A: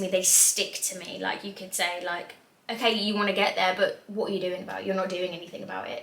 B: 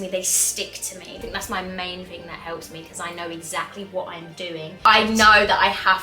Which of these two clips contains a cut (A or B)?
B